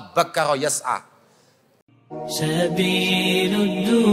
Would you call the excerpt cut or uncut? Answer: cut